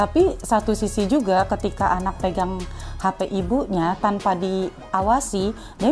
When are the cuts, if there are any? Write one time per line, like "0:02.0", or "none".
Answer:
0:02.2